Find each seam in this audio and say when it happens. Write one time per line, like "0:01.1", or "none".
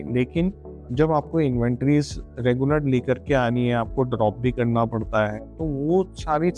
none

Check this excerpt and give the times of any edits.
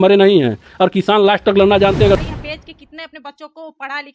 0:02.2

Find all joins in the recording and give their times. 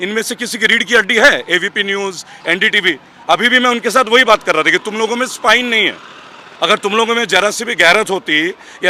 none

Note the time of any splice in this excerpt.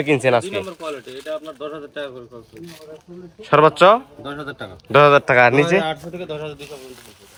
none

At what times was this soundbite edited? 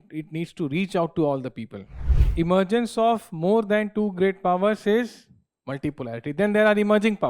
0:02.2

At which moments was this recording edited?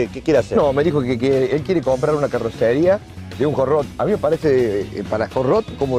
none

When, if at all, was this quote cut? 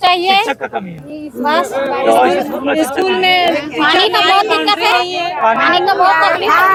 none

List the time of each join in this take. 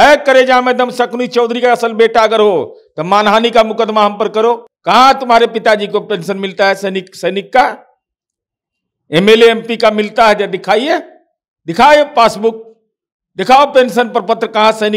0:04.7

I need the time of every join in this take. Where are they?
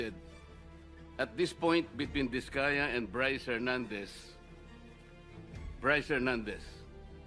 0:04.1
0:05.8

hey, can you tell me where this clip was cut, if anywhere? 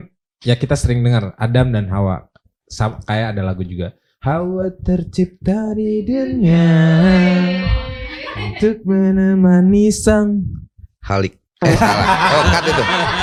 none

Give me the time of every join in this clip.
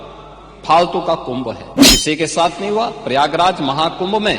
0:01.8

